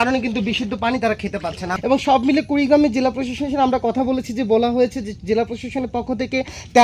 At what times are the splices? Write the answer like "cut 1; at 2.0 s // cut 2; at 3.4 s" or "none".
cut 1; at 1.7 s